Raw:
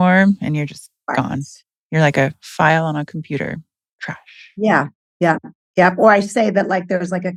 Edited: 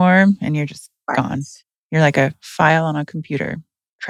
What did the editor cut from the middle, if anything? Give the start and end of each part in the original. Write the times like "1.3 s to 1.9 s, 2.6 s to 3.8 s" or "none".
none